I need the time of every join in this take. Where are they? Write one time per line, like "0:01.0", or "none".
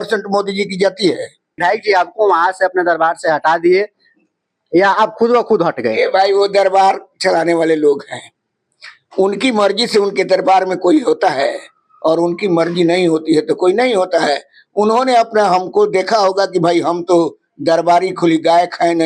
0:01.6